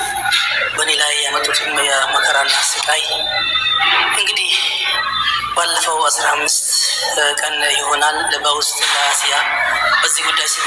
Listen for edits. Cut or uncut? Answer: uncut